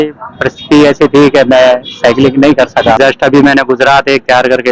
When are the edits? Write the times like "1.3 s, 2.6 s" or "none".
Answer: 3.0 s